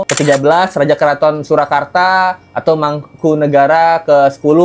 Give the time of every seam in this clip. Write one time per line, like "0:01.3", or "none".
none